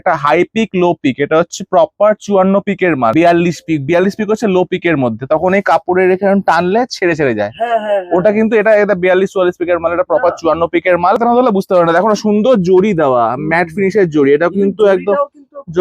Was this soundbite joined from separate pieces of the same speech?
yes; 2 cuts; at 3.1 s, 11.2 s

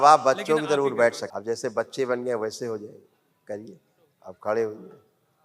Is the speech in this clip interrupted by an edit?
yes; 1 cut; at 1.3 s

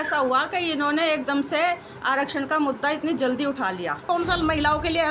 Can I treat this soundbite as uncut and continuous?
no; 1 cut; at 4.0 s

